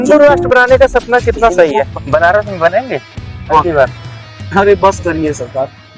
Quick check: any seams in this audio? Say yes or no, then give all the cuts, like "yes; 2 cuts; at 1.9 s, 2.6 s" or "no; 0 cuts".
yes; 1 cut; at 1.9 s